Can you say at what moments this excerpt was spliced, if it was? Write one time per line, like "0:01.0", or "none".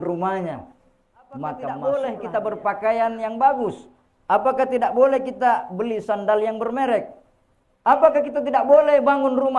0:01.8

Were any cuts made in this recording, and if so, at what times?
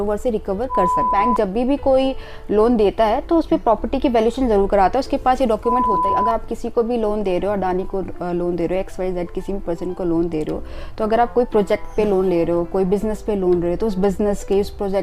0:01.1
0:06.0

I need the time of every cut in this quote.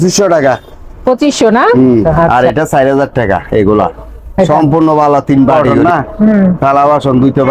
0:02.2
0:05.7

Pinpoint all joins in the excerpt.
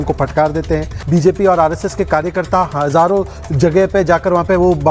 0:01.0

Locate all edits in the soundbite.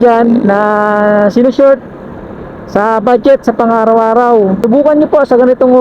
0:04.6

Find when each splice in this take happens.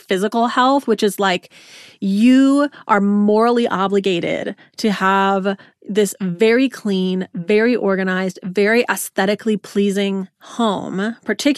none

